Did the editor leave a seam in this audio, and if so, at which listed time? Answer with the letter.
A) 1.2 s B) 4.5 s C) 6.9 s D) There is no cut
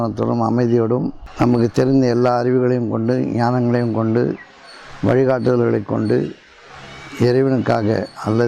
A